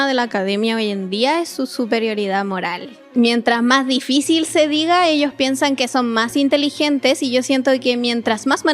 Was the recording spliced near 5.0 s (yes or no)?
no